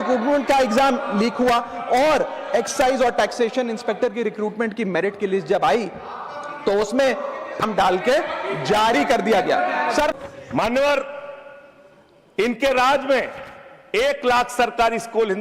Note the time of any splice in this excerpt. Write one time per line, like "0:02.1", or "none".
0:10.1